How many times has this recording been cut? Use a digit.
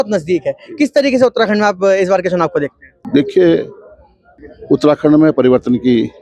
0